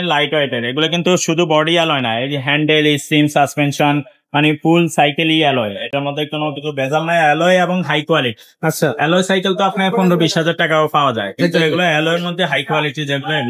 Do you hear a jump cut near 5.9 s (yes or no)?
no